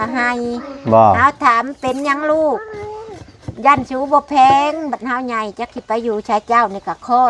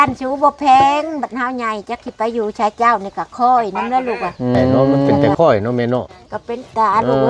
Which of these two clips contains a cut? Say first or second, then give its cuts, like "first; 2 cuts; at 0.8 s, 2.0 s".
second; 1 cut; at 5.3 s